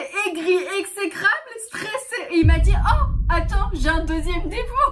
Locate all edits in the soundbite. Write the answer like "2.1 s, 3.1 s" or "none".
none